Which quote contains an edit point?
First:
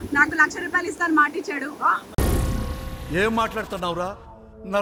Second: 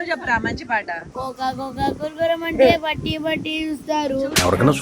second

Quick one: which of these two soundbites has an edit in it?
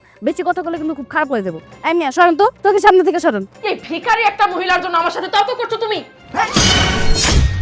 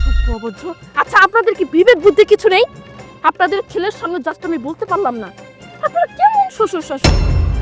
first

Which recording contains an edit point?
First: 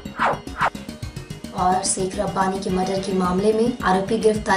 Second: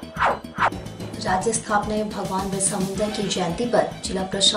second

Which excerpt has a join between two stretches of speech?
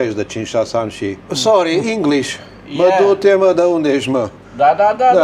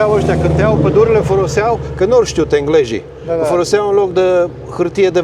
first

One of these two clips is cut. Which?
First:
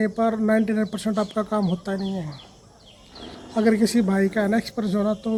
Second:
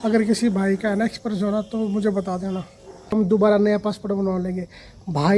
second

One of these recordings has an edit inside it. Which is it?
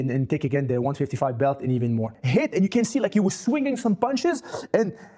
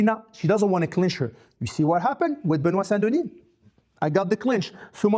first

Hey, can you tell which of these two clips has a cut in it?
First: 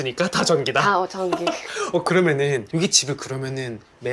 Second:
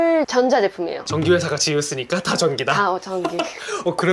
second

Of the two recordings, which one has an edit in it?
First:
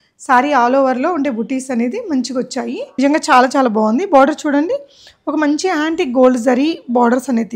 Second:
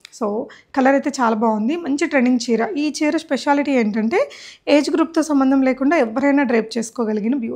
first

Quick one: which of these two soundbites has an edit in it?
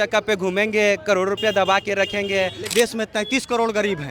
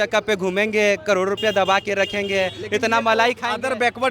first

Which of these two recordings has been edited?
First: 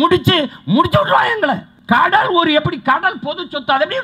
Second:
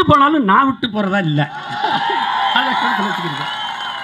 first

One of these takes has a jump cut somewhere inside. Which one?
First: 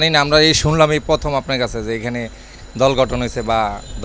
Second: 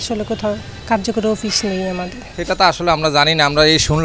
second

